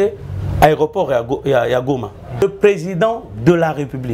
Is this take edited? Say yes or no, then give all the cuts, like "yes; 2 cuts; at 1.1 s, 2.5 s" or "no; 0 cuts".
yes; 1 cut; at 2.4 s